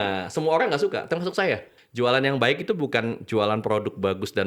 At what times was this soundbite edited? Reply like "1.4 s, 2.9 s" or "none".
1.7 s